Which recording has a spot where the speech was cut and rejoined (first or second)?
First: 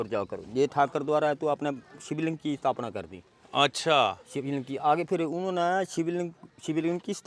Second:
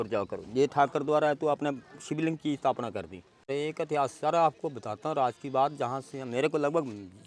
second